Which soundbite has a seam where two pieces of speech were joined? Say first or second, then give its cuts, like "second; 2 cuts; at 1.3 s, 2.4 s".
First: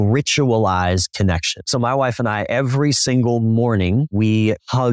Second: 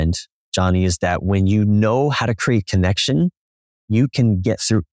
first; 2 cuts; at 1.5 s, 4.2 s